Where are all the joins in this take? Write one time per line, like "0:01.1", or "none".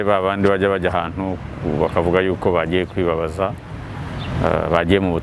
none